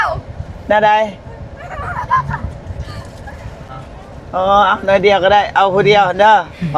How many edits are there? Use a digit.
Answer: 1